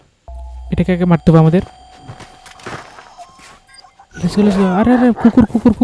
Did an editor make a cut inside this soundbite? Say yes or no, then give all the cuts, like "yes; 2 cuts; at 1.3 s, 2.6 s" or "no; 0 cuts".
no; 0 cuts